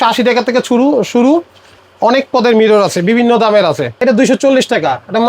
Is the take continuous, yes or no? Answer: no